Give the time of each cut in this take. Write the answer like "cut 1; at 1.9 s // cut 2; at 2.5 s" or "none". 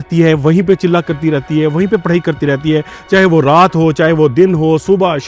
none